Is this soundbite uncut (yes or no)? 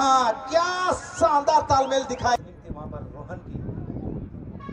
no